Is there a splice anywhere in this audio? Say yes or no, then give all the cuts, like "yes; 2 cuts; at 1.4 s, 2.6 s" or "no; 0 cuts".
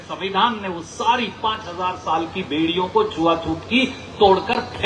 no; 0 cuts